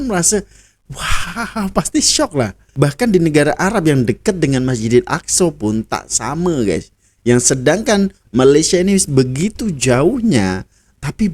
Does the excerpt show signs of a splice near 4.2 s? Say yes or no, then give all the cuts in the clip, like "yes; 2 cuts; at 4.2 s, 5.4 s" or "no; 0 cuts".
no; 1 cut; at 2.6 s